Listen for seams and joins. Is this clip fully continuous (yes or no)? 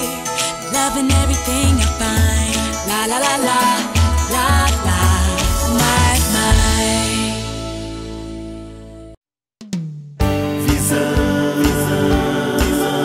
yes